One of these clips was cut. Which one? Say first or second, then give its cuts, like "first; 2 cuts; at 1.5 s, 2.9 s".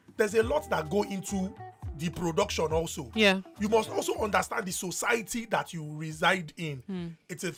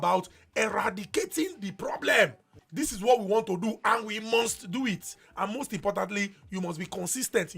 second; 2 cuts; at 2.5 s, 5.1 s